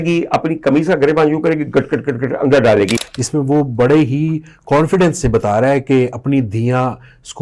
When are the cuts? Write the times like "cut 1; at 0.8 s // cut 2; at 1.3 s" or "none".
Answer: cut 1; at 3.0 s